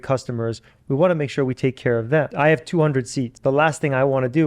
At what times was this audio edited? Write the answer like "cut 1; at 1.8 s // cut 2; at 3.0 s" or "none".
cut 1; at 2.3 s // cut 2; at 3.3 s